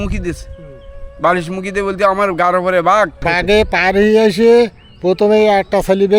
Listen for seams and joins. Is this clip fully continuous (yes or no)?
no